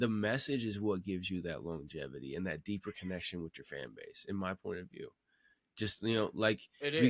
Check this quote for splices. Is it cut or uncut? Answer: uncut